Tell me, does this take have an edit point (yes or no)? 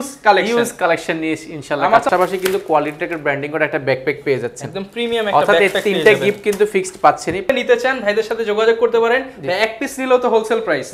yes